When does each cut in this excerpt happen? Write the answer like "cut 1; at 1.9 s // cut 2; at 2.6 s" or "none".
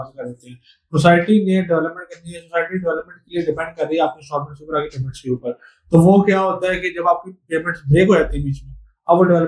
none